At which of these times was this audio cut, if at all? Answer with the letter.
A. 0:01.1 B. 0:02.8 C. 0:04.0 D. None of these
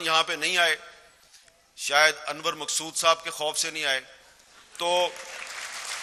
D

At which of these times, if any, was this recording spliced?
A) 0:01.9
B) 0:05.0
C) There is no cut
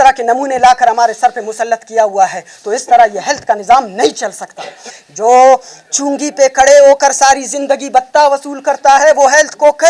B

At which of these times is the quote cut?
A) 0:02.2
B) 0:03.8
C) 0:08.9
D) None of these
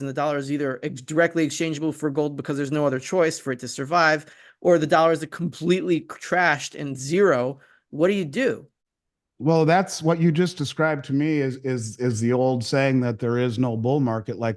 D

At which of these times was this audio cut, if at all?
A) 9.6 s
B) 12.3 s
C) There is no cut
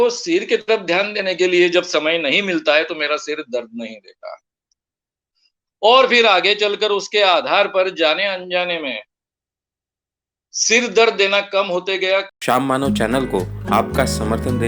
B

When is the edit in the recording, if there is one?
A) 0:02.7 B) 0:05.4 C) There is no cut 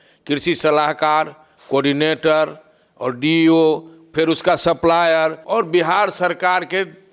B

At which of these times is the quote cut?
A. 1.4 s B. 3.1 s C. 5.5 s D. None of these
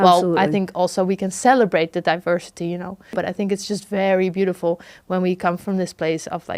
B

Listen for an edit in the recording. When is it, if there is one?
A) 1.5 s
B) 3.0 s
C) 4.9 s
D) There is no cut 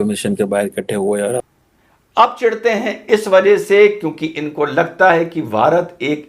A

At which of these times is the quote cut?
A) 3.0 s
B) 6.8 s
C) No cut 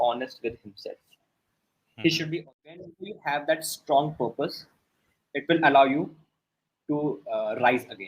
A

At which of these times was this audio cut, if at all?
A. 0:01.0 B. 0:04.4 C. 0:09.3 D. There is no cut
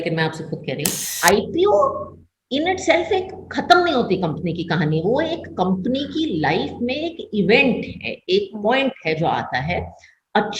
A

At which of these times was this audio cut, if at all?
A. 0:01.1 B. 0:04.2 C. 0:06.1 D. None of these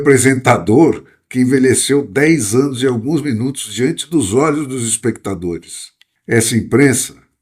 C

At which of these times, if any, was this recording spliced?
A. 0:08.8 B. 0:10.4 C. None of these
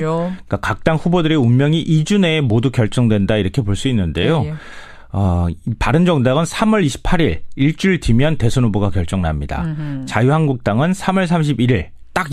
B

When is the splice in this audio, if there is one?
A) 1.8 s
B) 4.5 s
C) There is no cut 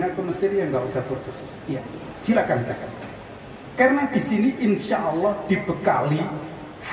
C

